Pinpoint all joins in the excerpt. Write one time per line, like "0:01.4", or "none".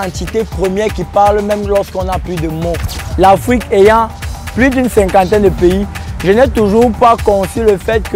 0:02.9

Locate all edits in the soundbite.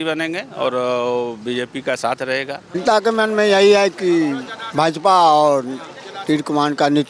0:02.8

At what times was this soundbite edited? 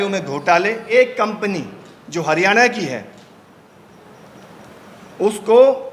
0:00.9

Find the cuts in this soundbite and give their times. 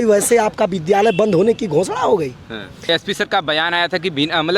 0:02.9

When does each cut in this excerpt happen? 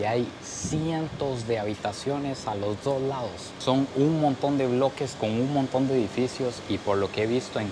none

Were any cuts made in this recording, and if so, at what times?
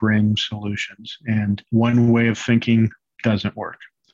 0:01.6
0:03.1

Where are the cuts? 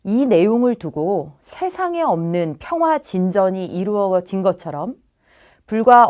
0:02.2

